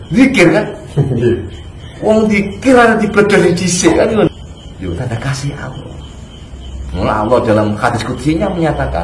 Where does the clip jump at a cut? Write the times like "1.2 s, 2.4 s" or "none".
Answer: 4.3 s